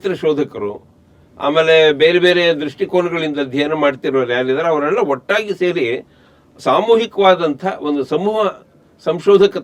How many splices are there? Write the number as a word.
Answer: zero